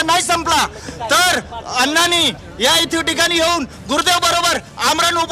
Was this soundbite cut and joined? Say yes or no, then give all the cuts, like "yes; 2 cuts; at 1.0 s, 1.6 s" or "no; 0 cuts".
no; 0 cuts